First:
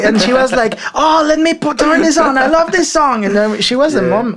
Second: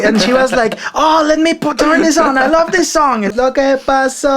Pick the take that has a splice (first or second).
second